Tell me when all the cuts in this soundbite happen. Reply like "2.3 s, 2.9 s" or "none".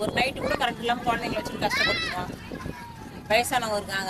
none